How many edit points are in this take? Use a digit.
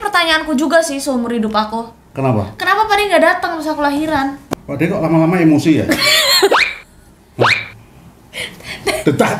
1